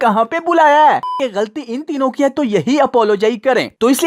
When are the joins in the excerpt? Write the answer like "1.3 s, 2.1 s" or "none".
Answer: 1.0 s